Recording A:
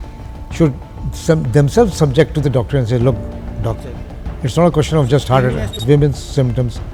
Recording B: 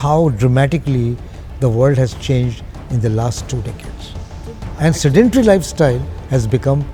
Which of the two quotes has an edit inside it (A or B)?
A